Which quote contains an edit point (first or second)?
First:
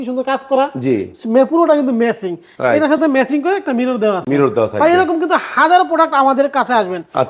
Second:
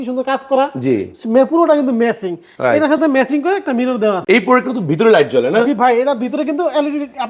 second